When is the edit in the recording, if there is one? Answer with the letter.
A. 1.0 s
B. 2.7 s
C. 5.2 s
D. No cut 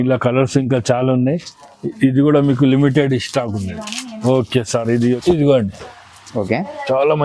C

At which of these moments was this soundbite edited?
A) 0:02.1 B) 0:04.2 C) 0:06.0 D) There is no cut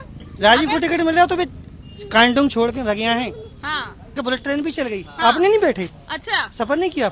B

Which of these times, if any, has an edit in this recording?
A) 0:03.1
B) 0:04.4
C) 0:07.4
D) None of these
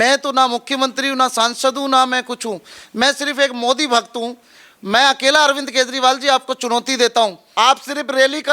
C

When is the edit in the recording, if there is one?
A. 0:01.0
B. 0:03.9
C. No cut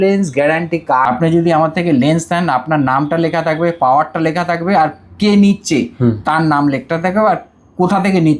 A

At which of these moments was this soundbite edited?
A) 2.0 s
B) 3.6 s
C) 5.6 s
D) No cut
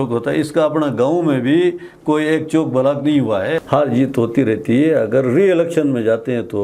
B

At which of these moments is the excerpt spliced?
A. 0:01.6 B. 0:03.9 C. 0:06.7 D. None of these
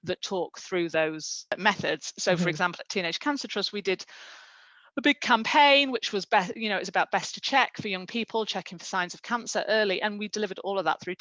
A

